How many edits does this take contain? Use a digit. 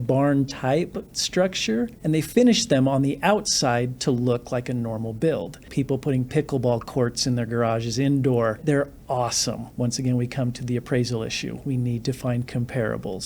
4